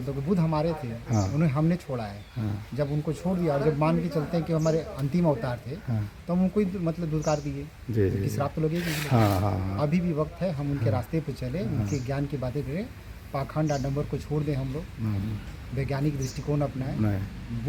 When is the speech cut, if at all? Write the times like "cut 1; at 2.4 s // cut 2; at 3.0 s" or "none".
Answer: none

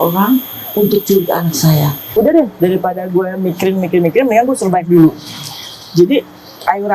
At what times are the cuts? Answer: cut 1; at 2.0 s

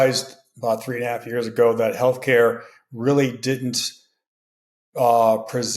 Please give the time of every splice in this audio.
none

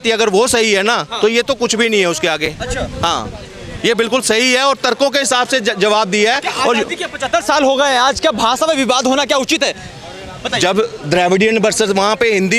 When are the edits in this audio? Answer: none

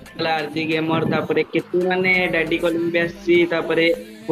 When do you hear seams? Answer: none

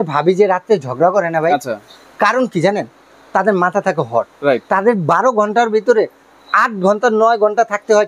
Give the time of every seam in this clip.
none

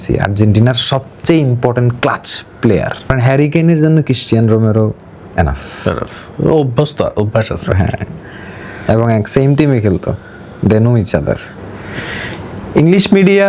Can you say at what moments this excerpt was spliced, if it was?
cut 1; at 3.1 s // cut 2; at 11.5 s

